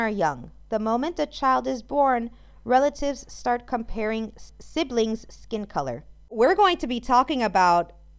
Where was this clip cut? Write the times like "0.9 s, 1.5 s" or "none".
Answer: 4.4 s, 6.3 s